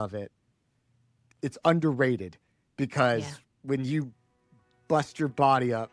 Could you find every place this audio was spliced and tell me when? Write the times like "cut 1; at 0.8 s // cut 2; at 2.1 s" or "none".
cut 1; at 1.2 s

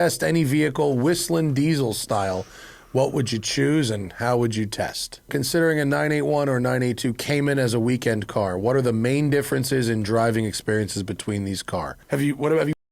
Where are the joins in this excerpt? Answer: cut 1; at 5.3 s // cut 2; at 12.0 s

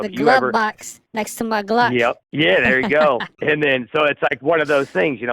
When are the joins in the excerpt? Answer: cut 1; at 3.3 s

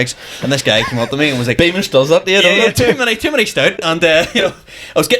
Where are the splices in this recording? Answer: none

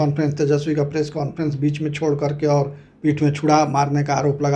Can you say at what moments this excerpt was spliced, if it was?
none

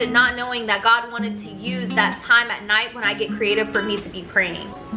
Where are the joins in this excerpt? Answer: none

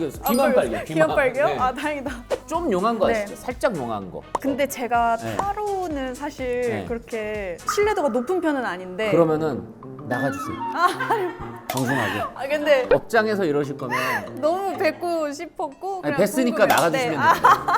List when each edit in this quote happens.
cut 1; at 2.3 s // cut 2; at 12.9 s

